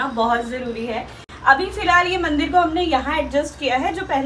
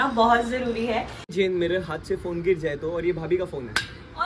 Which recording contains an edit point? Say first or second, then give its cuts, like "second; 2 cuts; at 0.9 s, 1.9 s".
second; 1 cut; at 1.3 s